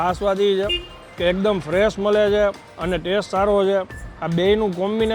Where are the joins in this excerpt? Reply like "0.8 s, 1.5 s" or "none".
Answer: none